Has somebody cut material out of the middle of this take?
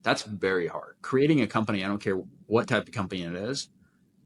yes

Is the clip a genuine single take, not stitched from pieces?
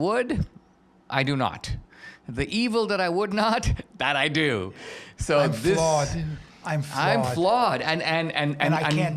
yes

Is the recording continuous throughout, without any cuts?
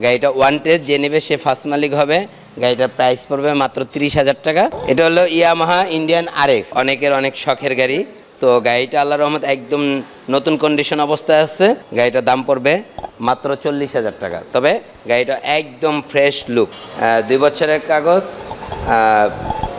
no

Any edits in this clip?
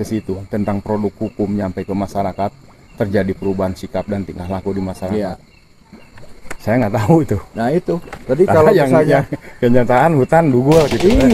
no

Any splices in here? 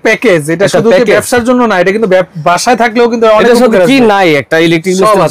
no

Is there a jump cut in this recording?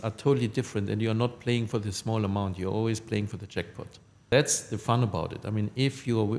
yes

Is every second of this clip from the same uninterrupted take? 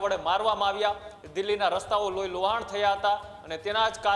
yes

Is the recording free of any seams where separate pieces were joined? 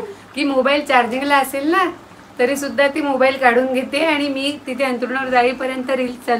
yes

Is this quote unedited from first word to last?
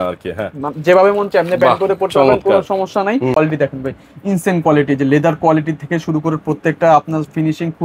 no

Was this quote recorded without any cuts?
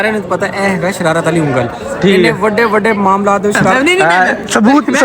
no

